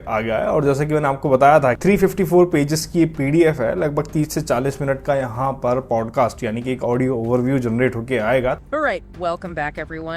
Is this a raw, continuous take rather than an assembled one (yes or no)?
no